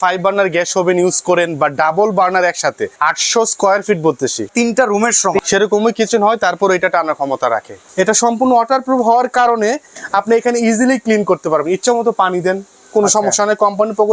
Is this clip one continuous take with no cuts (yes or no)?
no